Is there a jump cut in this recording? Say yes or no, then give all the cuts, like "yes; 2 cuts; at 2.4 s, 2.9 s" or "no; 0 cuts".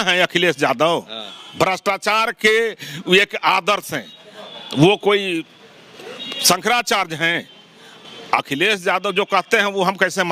no; 0 cuts